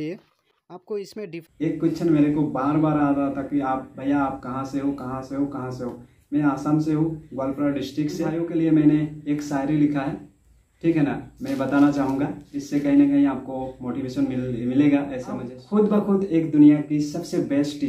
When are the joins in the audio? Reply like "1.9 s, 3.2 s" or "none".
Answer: 1.3 s, 8.3 s, 15.5 s

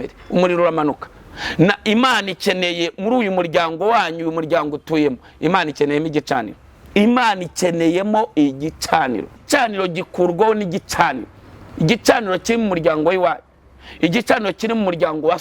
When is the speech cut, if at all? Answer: 9.4 s

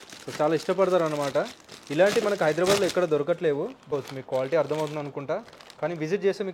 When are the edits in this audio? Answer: 3.9 s

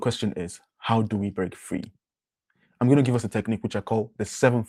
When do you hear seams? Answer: none

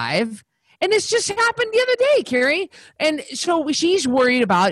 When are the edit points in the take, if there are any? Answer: 3.8 s

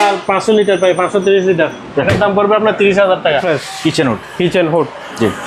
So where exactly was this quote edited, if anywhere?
3.4 s

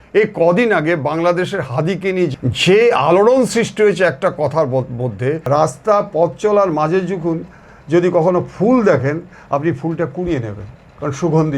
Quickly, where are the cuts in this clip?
2.3 s, 5.4 s

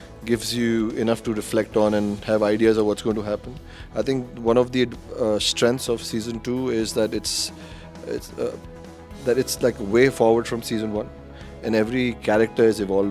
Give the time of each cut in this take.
none

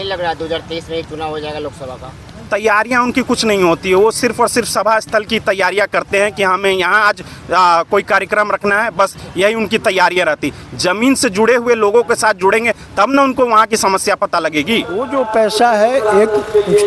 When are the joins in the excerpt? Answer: 15.0 s

